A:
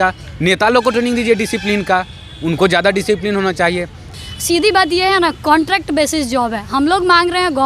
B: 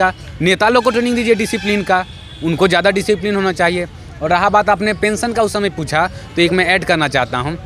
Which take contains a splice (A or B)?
A